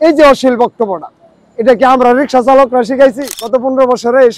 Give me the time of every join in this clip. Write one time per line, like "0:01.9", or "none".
0:03.3